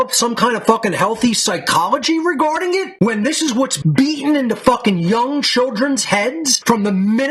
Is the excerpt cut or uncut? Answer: uncut